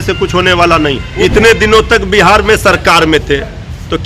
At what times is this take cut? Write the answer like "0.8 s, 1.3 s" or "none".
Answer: 1.1 s